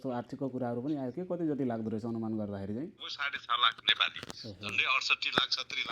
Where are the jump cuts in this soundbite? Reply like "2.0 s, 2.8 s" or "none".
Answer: 3.1 s